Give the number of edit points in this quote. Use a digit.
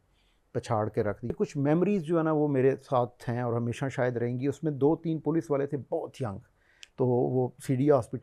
1